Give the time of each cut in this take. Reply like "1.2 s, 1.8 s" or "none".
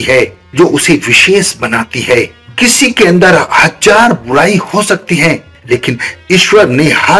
5.5 s